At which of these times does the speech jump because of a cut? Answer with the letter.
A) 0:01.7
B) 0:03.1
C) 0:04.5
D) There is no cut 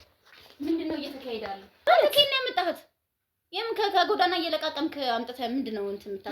A